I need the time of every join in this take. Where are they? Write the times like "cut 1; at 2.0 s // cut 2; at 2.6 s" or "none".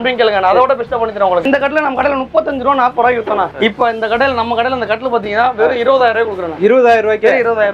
cut 1; at 1.4 s // cut 2; at 3.5 s

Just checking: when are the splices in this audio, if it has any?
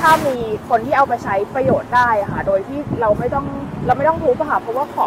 none

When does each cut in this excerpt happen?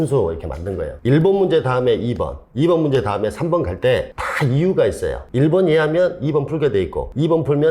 cut 1; at 0.9 s

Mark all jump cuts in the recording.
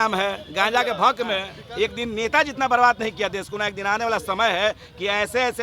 cut 1; at 1.5 s

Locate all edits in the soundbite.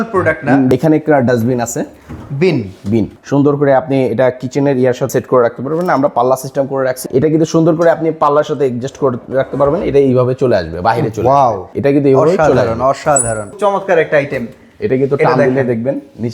cut 1; at 0.7 s // cut 2; at 3.2 s // cut 3; at 5.1 s // cut 4; at 7.0 s // cut 5; at 11.7 s // cut 6; at 13.5 s

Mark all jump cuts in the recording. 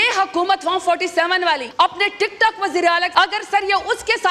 cut 1; at 1.7 s // cut 2; at 3.1 s

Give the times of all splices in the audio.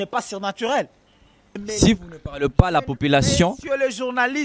cut 1; at 1.6 s

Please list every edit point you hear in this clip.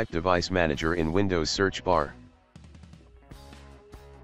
cut 1; at 2.1 s

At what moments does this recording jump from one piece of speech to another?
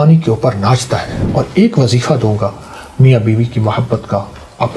cut 1; at 1.2 s

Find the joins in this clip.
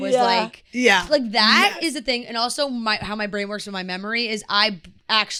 none

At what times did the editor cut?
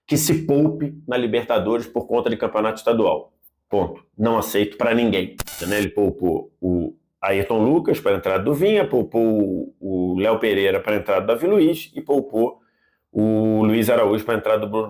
cut 1; at 5.5 s

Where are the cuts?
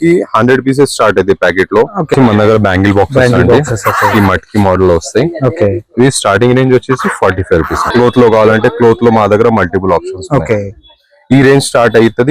cut 1; at 2.1 s // cut 2; at 7.9 s

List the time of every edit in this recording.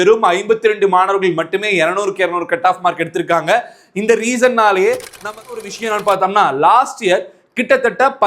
cut 1; at 5.6 s

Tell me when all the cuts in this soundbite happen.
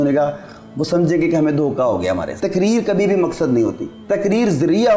cut 1; at 2.3 s // cut 2; at 3.9 s

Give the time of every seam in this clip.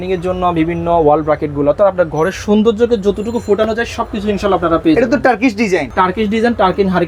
cut 1; at 5.9 s

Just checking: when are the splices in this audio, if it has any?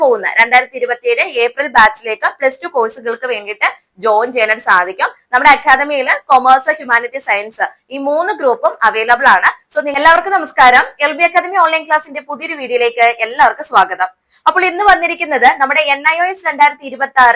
cut 1; at 10.0 s

